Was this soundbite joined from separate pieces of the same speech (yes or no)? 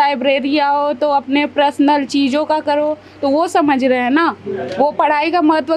no